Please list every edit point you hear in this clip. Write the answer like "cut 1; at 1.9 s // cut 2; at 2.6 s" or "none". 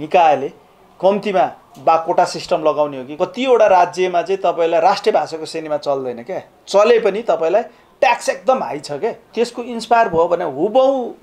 cut 1; at 3.0 s // cut 2; at 9.3 s